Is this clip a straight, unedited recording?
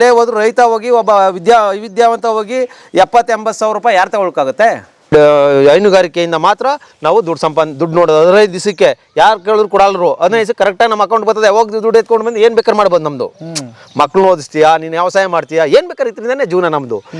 no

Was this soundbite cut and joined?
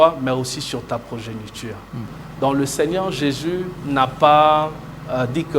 yes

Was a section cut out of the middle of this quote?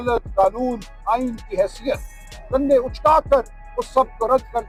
no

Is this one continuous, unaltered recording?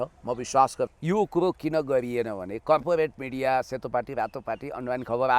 no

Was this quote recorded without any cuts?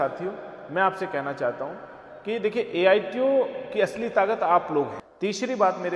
no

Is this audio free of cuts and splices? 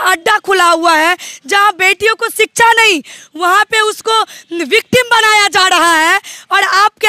yes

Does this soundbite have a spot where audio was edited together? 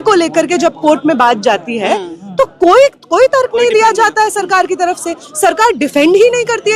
no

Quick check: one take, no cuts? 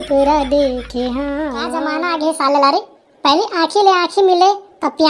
no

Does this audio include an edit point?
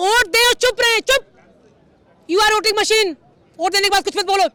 no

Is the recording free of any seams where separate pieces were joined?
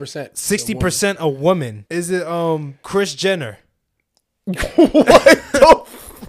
no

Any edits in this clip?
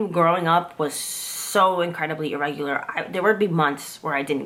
no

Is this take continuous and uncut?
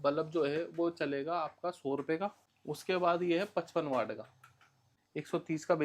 no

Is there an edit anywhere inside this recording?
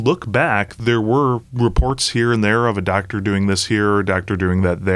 yes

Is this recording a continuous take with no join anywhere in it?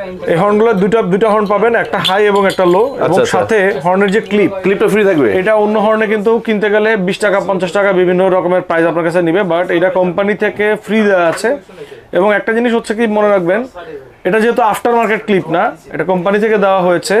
yes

